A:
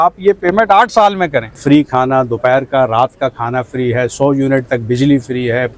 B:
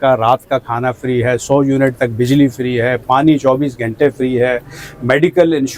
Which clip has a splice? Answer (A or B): A